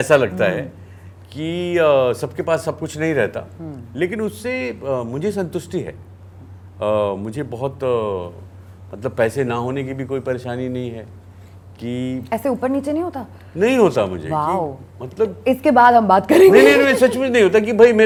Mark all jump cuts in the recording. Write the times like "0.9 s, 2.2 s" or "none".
none

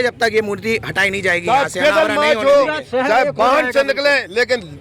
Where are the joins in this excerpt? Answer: none

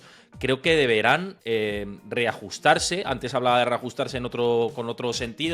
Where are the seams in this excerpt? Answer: 1.3 s

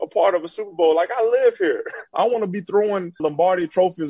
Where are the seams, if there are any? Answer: 2.1 s, 3.2 s

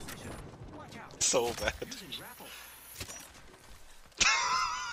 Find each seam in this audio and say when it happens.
1.1 s

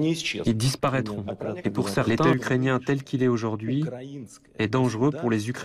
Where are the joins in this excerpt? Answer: 2.0 s

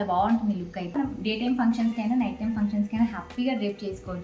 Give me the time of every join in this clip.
0.9 s

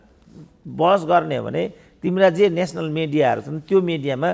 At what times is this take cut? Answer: none

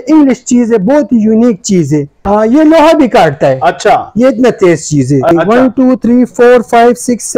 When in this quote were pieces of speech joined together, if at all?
2.1 s, 5.3 s

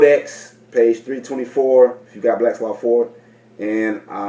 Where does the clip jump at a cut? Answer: none

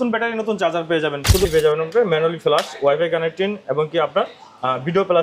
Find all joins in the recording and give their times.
1.5 s

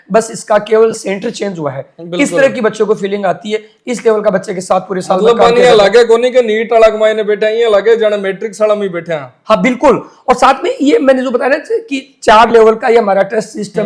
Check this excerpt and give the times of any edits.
none

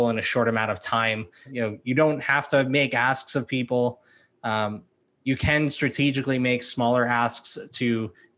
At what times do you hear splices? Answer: 1.5 s

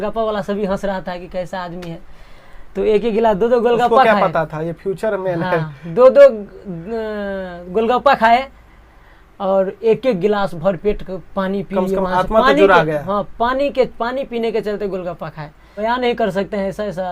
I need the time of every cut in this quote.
15.7 s

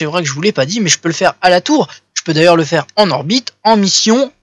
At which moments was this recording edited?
1.8 s

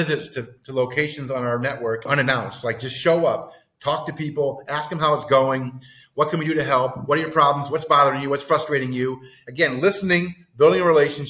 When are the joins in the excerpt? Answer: 2.1 s

